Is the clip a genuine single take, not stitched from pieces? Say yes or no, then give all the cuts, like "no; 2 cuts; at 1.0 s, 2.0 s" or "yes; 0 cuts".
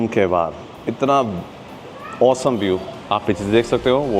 yes; 0 cuts